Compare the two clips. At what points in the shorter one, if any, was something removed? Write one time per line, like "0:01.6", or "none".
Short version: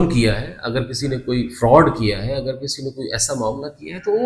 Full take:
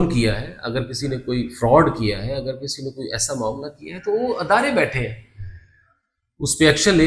none